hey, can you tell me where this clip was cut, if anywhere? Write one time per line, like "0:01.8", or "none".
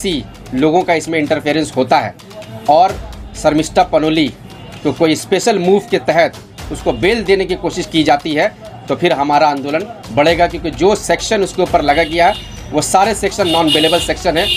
none